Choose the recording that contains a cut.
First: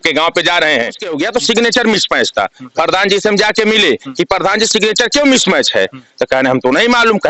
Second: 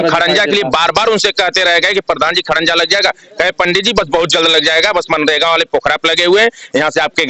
first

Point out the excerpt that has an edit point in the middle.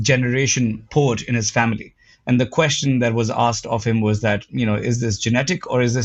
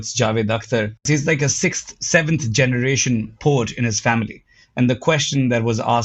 second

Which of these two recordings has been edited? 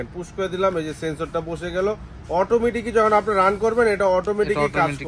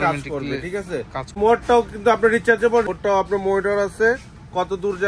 second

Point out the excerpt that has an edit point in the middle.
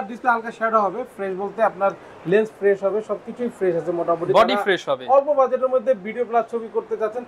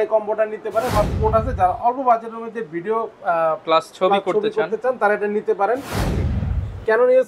second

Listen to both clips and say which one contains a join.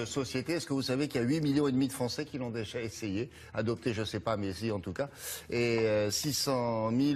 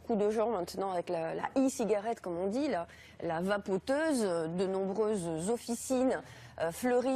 second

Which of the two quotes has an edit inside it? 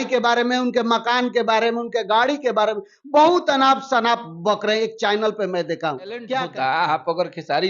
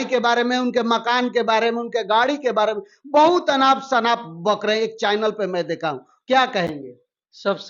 first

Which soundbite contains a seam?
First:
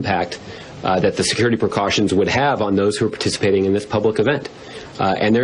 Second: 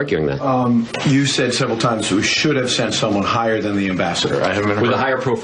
first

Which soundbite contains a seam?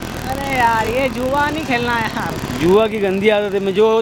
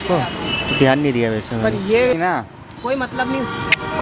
second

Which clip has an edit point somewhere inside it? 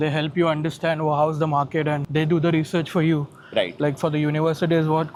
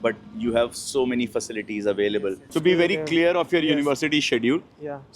second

